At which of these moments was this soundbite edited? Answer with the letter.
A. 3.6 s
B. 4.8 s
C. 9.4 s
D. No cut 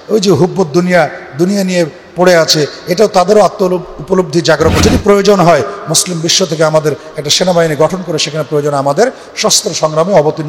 B